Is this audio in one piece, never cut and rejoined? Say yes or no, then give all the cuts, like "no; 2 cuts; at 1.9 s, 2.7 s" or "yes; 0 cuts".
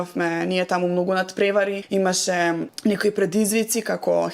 no; 2 cuts; at 1.8 s, 2.7 s